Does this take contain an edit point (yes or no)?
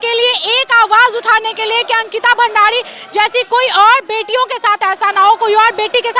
no